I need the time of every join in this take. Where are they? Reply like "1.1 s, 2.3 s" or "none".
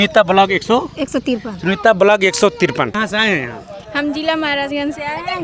2.9 s